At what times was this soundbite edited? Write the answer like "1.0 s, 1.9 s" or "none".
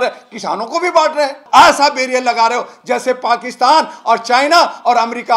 1.4 s

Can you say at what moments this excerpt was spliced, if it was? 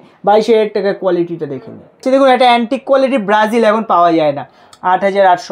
2.0 s

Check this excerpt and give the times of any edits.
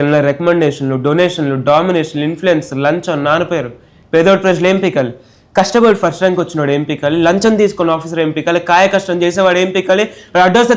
none

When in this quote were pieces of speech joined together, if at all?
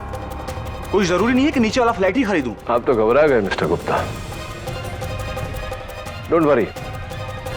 none

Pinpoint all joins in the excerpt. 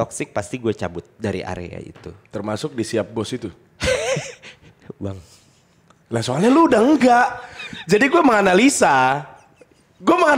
none

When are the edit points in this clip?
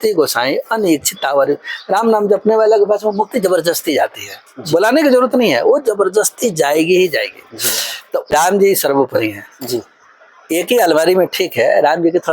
8.3 s

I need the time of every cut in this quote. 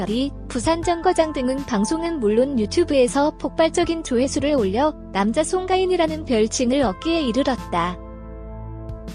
none

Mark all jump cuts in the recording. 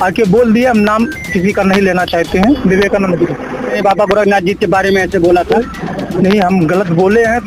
2.6 s, 3.8 s, 5.9 s

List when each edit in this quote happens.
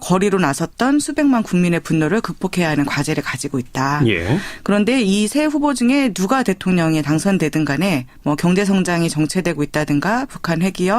3.4 s

